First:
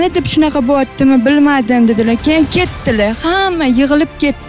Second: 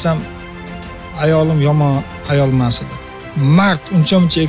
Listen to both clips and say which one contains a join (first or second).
second